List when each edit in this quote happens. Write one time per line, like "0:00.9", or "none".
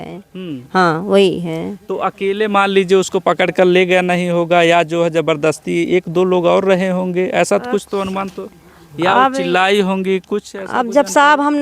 none